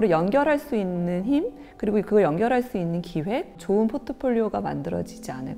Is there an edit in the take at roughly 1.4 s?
no; 1 cut; at 3.6 s

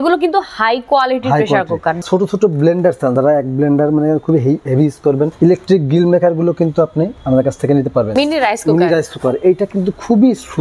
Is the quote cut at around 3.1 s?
yes; 5 cuts; at 2.0 s, 3.1 s, 5.3 s, 7.2 s, 8.1 s

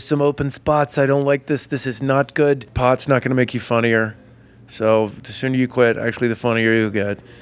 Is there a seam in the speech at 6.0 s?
no; 1 cut; at 2.7 s

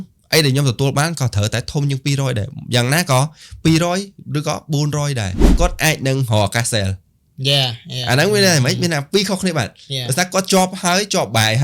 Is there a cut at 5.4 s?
yes; 1 cut; at 5.4 s

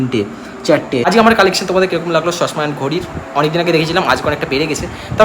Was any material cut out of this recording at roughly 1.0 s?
yes; 1 cut; at 1.0 s

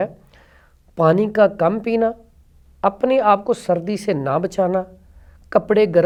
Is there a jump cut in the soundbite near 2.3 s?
no; 0 cuts

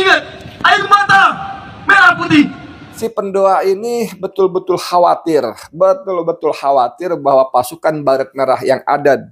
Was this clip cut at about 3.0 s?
yes; 1 cut; at 3.0 s

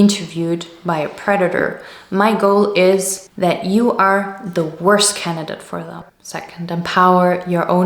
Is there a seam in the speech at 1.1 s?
no; 1 cut; at 5.9 s

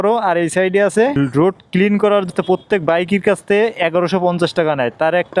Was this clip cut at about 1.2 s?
yes; 2 cuts; at 1.2 s, 2.3 s

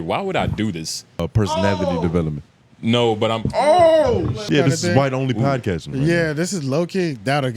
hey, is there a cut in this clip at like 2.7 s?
no; 2 cuts; at 1.3 s, 4.5 s

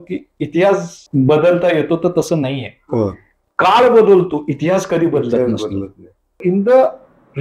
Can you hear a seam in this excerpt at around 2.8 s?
no; 2 cuts; at 1.0 s, 6.4 s

